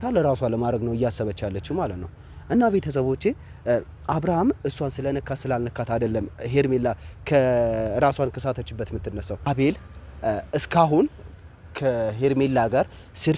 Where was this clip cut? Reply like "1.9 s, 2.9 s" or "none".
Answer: 9.5 s